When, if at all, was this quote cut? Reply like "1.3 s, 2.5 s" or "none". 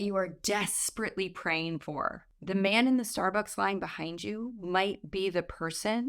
2.3 s

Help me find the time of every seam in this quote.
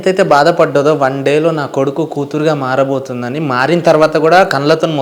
none

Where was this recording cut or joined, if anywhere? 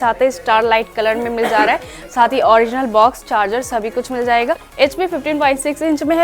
4.7 s

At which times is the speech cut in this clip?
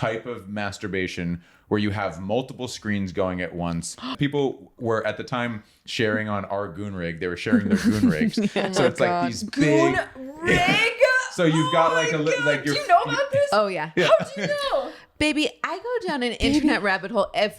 4.1 s

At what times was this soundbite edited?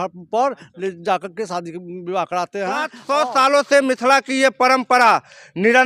3.0 s

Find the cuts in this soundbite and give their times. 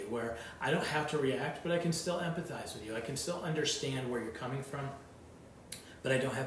none

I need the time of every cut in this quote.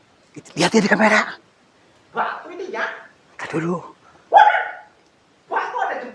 4.2 s

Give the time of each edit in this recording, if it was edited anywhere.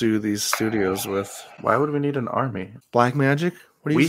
2.7 s

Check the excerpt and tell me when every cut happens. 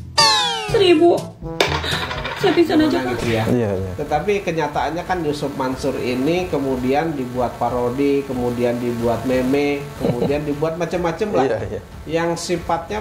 3.1 s

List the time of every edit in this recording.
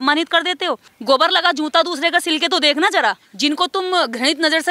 0.9 s, 3.3 s

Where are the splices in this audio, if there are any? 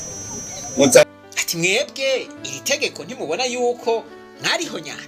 none

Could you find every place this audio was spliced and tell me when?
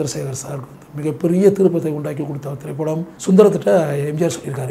3.1 s

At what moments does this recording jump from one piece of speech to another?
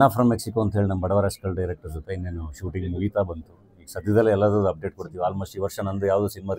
none

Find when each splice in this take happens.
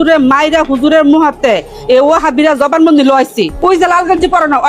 3.6 s

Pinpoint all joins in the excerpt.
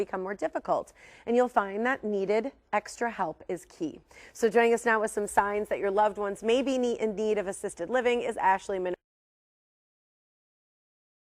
none

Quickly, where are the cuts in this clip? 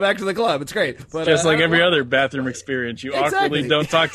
1.0 s

